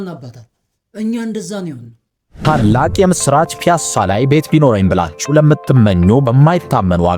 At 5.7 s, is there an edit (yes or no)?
no